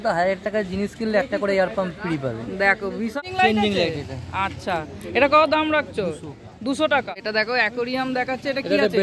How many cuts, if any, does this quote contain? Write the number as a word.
two